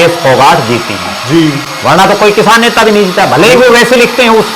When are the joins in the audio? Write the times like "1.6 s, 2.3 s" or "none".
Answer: none